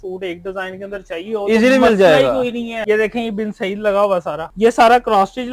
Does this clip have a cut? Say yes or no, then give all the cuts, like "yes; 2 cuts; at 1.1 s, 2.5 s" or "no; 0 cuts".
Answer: yes; 2 cuts; at 2.8 s, 4.4 s